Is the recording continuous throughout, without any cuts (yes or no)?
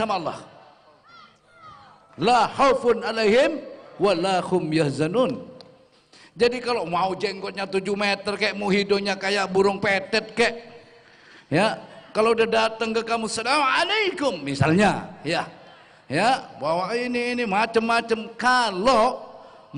yes